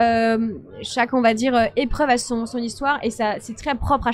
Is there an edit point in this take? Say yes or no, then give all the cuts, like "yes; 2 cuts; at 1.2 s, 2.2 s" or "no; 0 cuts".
no; 0 cuts